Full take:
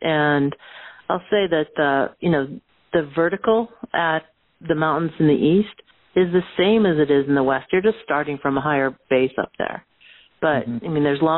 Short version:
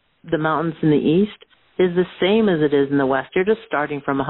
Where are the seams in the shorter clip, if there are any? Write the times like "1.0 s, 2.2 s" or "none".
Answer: none